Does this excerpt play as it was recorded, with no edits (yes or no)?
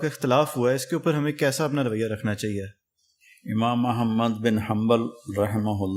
yes